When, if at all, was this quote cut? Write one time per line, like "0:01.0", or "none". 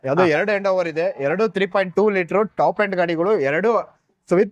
none